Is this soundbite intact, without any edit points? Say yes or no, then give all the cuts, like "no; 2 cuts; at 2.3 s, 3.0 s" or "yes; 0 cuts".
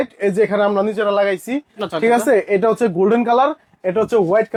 yes; 0 cuts